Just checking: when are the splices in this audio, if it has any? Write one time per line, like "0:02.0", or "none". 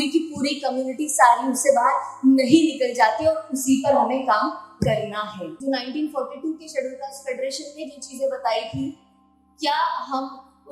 0:05.6